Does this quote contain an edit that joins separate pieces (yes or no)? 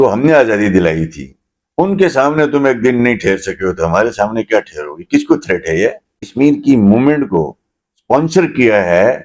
yes